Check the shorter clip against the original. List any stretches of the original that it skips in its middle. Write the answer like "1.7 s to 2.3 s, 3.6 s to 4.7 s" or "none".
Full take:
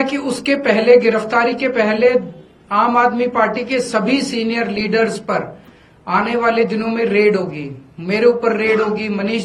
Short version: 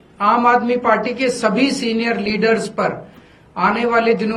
none